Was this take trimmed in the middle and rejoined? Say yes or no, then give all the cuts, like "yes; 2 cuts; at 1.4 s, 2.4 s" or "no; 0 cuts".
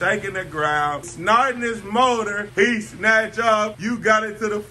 yes; 3 cuts; at 1.1 s, 2.4 s, 3.8 s